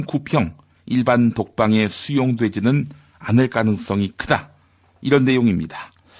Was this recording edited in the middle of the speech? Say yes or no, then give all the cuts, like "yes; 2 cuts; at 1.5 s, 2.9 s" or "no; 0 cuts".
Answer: no; 0 cuts